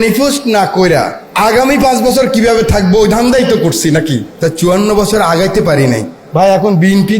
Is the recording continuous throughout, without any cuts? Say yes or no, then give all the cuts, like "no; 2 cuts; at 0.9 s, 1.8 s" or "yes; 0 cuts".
no; 2 cuts; at 1.2 s, 4.3 s